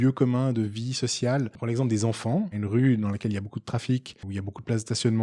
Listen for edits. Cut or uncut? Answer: cut